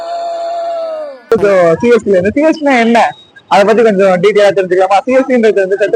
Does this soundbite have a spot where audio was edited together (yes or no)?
yes